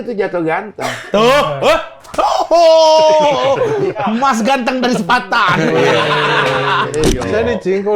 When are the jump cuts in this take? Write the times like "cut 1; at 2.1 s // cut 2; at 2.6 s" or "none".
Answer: cut 1; at 7.1 s